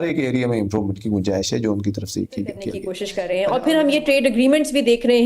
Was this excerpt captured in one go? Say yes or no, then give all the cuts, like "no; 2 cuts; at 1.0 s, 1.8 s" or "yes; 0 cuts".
no; 1 cut; at 3.3 s